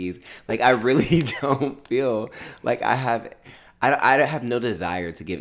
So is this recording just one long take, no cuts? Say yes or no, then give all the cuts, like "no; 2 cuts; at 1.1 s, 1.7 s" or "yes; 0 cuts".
yes; 0 cuts